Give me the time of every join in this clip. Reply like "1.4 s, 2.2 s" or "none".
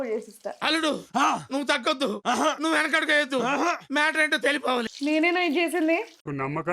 4.9 s